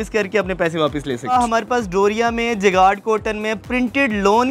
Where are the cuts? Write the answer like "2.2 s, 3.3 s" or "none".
1.3 s